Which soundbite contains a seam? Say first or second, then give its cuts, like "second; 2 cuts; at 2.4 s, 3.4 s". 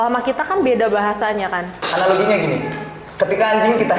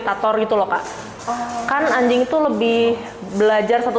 first; 1 cut; at 1.7 s